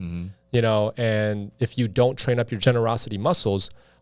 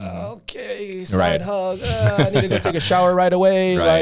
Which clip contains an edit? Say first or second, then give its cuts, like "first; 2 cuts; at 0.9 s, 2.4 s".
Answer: first; 1 cut; at 2.5 s